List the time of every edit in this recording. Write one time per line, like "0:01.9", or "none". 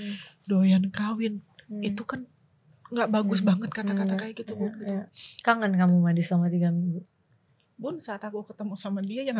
0:05.2